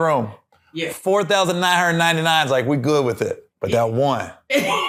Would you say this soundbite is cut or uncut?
uncut